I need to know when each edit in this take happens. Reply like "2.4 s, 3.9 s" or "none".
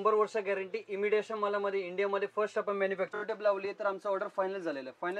3.1 s